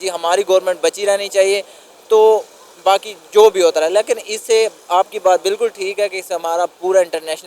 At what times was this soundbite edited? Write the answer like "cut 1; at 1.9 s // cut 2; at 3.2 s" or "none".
none